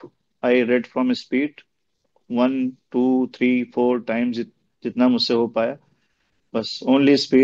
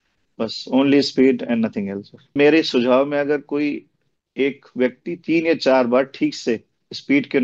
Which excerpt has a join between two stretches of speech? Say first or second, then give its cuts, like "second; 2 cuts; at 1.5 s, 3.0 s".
second; 1 cut; at 2.4 s